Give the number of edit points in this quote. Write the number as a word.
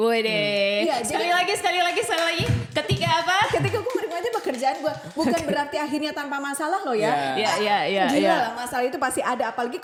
zero